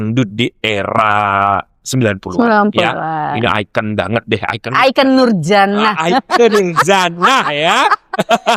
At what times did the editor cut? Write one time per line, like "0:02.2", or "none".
none